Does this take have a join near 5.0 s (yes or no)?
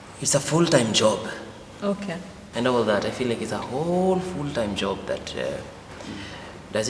no